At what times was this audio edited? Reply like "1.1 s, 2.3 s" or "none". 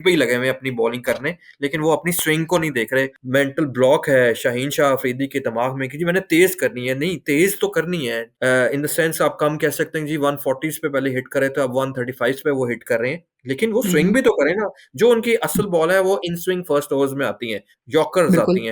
8.3 s

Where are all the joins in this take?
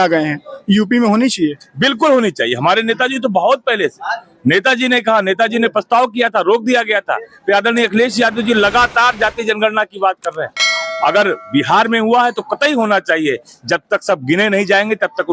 none

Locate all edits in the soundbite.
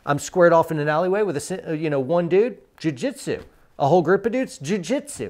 none

